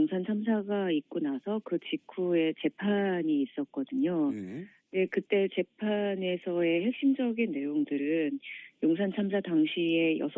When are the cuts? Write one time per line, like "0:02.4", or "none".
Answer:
0:04.1